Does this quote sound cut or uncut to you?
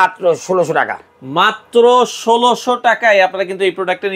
uncut